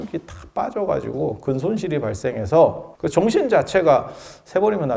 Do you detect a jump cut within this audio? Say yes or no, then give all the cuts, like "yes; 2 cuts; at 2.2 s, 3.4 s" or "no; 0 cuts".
yes; 1 cut; at 2.9 s